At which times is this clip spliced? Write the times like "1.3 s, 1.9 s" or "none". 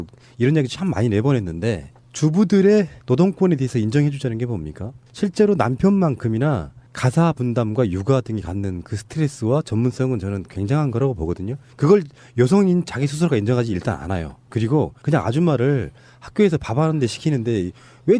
5.1 s